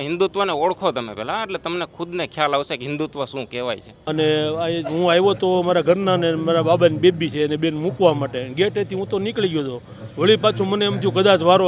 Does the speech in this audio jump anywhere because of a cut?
yes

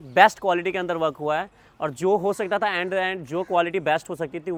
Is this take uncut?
yes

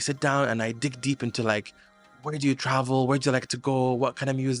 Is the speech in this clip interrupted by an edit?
no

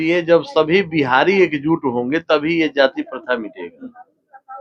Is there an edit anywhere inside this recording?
no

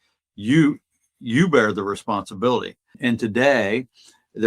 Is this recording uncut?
no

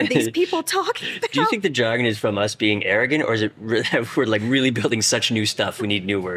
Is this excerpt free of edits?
yes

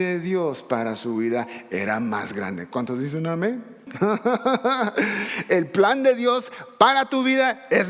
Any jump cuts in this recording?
yes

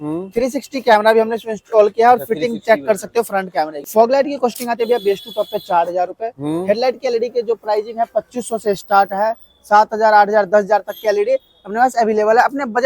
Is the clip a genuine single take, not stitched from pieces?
no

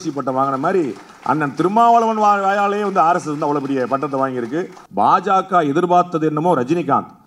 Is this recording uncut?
no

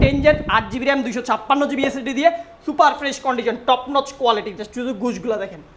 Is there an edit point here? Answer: no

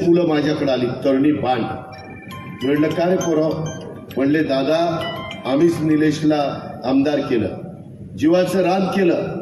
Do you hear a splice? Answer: no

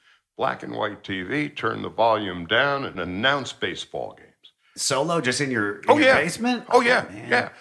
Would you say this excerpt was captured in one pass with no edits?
no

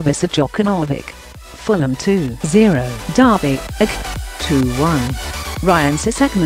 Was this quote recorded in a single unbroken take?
yes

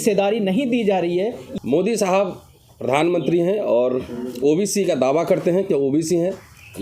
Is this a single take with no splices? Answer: no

